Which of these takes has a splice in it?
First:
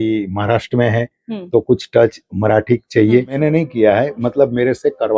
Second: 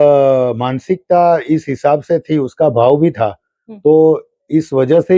first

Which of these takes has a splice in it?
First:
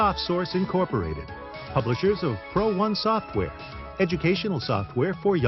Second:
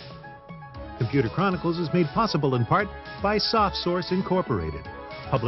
second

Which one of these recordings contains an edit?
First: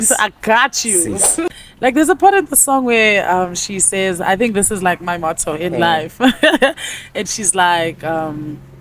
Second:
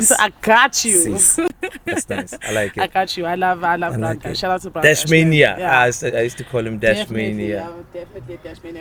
first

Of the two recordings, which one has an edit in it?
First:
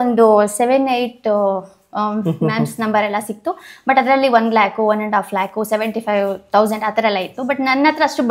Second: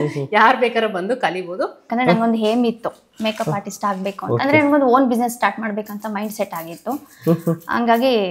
second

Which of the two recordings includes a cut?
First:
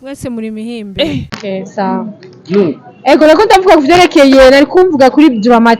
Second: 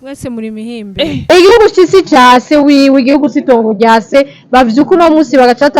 second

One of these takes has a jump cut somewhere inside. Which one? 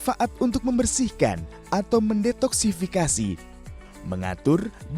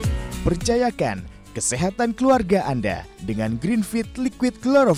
first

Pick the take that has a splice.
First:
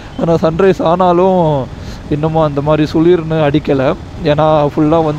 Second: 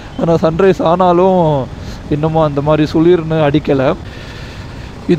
second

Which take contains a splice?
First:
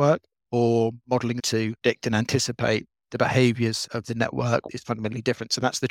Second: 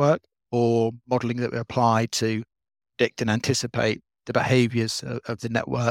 first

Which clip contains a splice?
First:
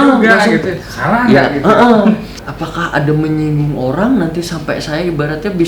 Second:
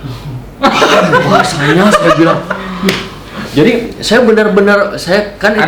first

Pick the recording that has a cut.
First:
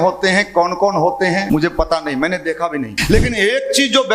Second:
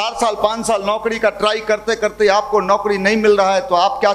first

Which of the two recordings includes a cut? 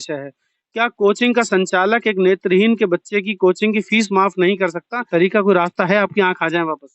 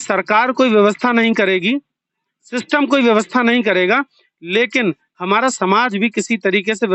first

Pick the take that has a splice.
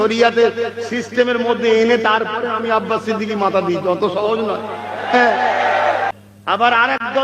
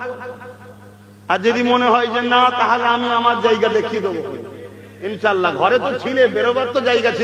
first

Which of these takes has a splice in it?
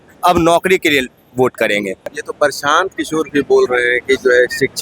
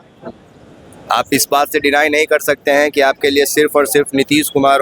first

